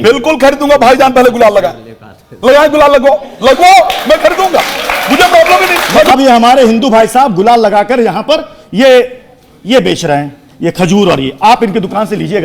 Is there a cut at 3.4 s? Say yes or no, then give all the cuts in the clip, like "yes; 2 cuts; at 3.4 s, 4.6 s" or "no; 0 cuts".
no; 1 cut; at 6.1 s